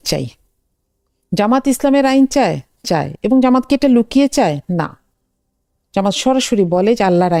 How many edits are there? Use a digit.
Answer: 0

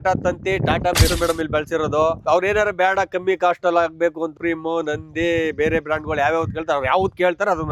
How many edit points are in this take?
2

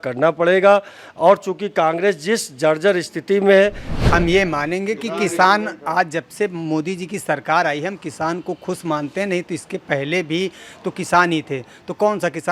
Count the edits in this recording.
1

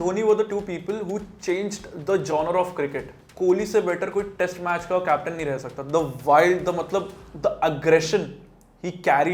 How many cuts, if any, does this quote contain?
1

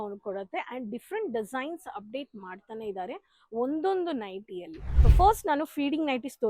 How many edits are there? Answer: 1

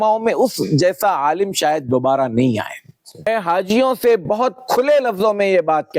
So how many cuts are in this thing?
1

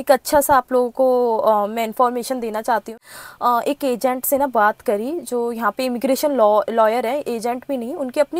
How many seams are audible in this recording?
1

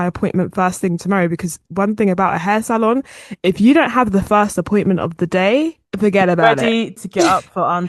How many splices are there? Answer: 1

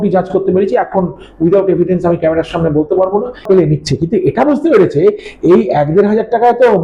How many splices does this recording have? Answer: 1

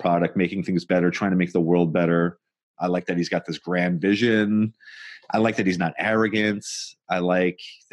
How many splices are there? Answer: 1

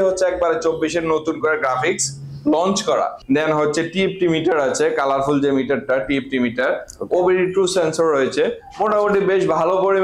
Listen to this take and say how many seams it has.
1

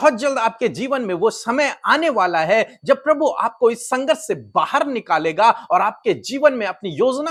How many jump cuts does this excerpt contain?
0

